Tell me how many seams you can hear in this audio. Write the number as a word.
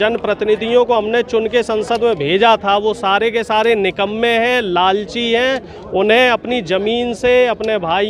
zero